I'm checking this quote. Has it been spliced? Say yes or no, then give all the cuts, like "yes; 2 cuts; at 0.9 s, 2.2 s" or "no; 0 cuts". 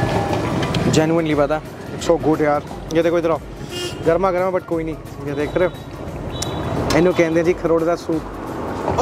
no; 0 cuts